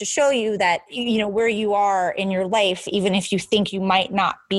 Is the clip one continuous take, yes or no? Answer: no